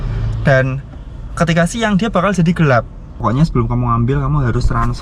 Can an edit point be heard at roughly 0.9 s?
no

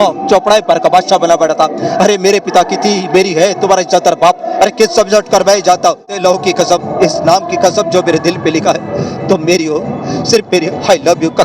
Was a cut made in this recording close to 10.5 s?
no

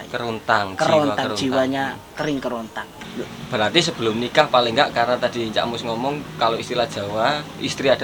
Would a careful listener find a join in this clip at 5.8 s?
no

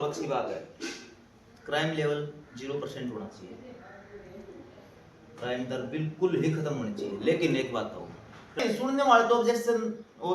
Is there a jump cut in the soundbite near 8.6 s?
yes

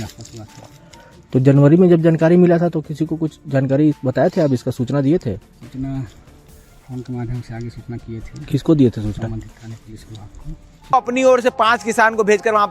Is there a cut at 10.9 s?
yes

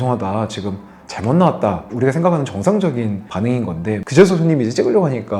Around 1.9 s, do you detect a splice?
yes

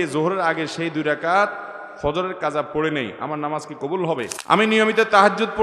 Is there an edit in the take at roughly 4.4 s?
yes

